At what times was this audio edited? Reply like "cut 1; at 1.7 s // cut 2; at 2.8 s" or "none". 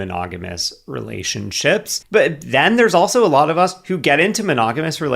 cut 1; at 2.1 s